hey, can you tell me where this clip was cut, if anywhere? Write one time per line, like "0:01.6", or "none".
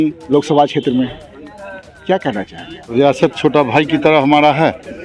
0:02.9